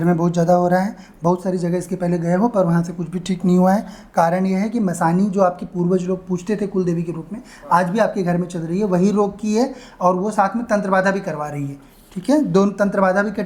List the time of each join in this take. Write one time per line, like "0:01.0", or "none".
none